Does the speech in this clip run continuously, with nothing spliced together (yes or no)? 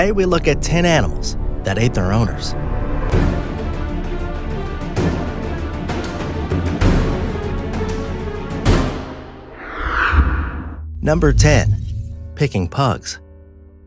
yes